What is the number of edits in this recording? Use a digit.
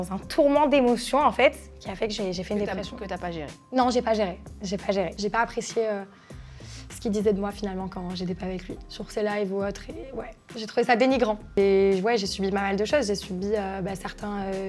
2